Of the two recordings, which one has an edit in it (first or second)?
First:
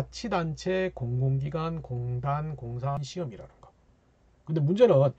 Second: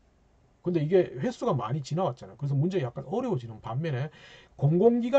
first